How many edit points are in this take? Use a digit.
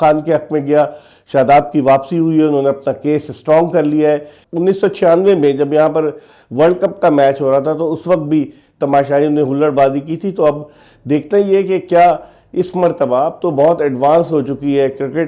1